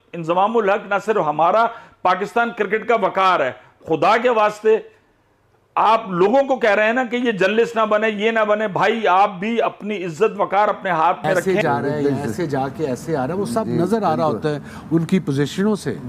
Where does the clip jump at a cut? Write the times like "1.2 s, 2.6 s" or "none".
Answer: 11.4 s